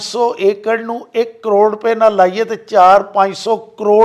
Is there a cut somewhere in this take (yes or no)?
no